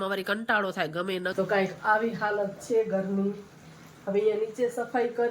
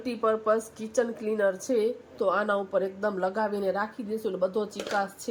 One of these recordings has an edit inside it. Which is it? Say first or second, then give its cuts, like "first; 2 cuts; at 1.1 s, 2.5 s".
first; 1 cut; at 1.3 s